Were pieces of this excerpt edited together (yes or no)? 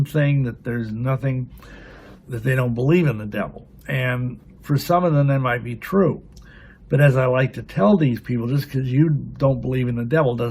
yes